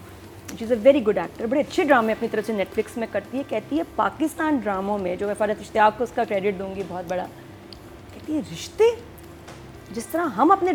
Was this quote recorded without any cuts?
yes; 0 cuts

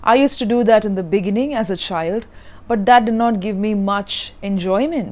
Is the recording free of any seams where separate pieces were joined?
yes; 0 cuts

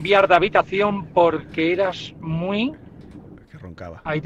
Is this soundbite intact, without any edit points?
yes; 0 cuts

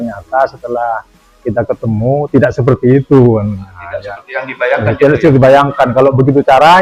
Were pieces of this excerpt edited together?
no; 0 cuts

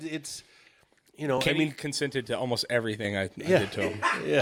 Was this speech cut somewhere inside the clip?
no; 0 cuts

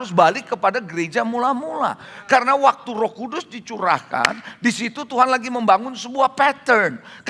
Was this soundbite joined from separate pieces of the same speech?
no; 0 cuts

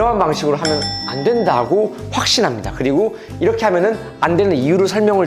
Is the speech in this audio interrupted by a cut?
no; 0 cuts

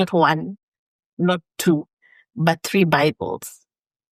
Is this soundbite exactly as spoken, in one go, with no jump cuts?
yes; 0 cuts

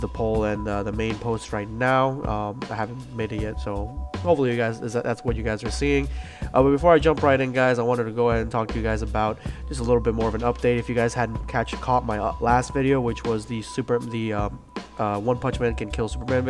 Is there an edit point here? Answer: yes; 1 cut; at 3.1 s

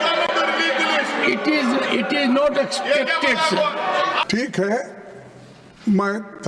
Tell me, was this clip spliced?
yes; 1 cut; at 4.3 s

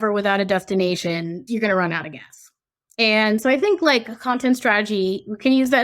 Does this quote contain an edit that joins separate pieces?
yes; 1 cut; at 1.4 s

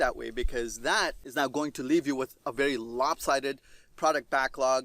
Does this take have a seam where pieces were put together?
yes; 1 cut; at 1.2 s

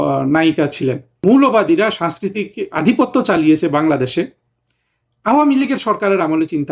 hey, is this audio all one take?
no; 1 cut; at 1.1 s

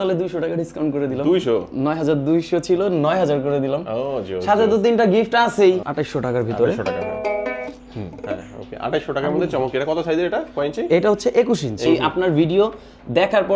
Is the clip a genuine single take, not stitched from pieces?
no; 2 cuts; at 5.9 s, 11.9 s

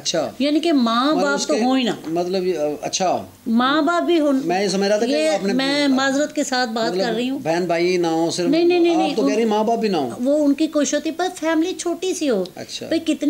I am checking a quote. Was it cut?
no; 0 cuts

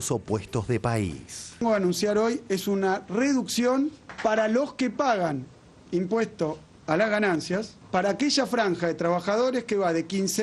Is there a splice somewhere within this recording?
yes; 1 cut; at 1.6 s

